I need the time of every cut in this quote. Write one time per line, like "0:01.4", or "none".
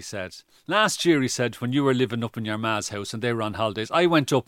none